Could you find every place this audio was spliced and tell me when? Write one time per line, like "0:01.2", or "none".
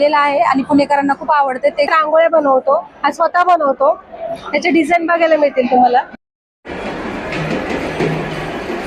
0:01.9